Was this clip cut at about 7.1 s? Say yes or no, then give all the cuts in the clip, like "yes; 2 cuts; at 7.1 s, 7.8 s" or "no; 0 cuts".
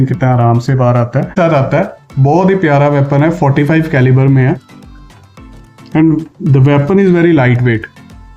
no; 1 cut; at 1.4 s